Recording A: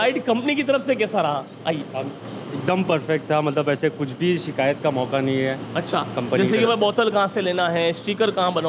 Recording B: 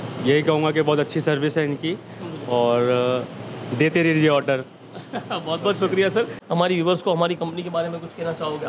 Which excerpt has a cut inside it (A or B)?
B